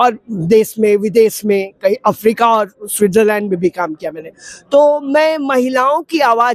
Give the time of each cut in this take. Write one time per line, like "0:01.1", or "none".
none